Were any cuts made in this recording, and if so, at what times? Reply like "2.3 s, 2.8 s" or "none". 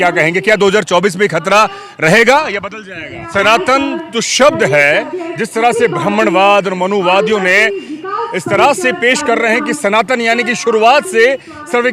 3.2 s